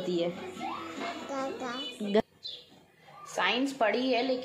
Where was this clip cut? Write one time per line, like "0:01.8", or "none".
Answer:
0:02.2